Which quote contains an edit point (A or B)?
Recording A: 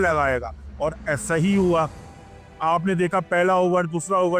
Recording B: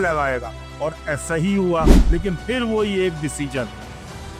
B